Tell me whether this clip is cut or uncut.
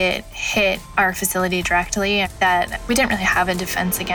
uncut